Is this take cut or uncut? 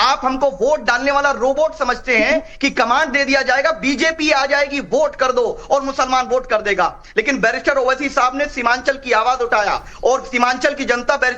uncut